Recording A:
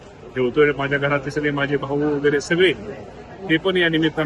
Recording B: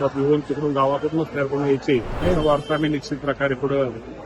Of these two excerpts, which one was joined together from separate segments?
B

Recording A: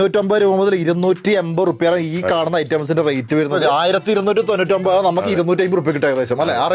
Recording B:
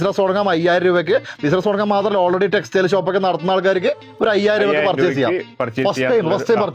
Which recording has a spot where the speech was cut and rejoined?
A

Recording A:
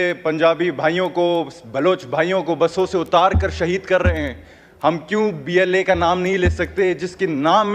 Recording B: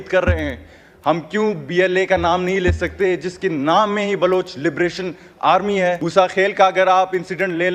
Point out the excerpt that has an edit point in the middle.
B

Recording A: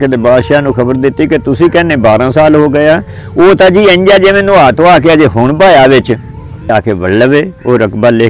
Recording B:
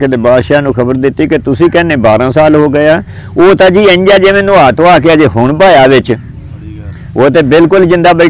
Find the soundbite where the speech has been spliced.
A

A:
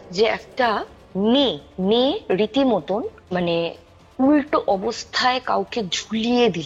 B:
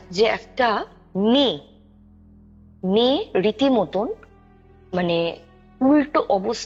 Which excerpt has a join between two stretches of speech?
A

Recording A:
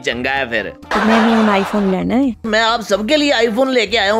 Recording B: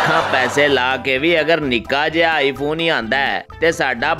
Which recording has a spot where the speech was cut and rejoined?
A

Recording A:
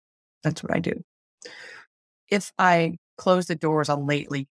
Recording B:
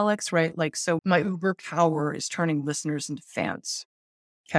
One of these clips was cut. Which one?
B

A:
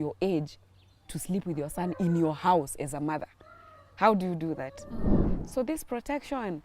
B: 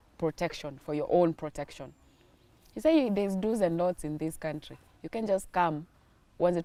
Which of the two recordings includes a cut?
A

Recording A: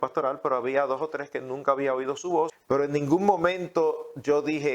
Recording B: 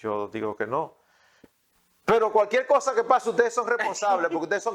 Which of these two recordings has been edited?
A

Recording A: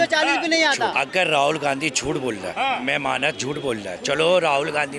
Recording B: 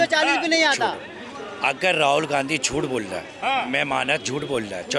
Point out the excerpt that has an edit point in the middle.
A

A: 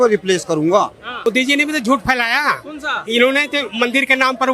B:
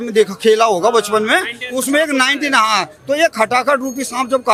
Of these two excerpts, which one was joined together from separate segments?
A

